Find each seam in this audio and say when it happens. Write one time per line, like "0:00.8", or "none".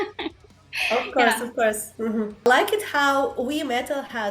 0:02.5